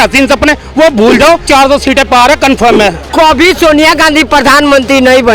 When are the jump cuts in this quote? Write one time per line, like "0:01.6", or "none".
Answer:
0:01.4
0:03.1